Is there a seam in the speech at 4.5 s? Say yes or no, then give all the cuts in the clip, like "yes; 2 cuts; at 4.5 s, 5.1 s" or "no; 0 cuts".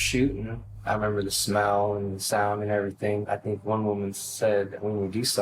no; 1 cut; at 3.2 s